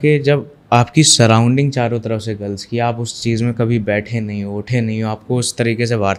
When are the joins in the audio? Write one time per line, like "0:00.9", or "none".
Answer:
none